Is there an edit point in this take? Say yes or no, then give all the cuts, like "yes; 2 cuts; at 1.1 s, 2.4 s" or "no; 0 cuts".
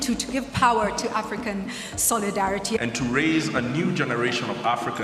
yes; 1 cut; at 2.8 s